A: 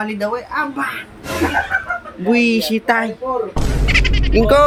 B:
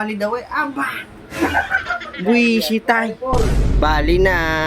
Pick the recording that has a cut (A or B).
B